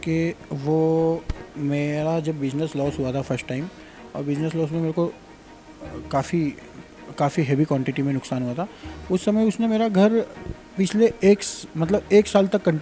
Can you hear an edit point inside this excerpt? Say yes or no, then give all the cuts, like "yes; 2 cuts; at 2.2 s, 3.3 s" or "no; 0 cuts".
no; 0 cuts